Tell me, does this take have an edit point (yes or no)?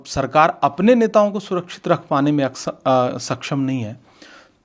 no